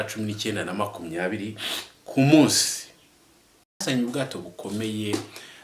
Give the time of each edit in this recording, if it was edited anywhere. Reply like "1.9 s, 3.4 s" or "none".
3.8 s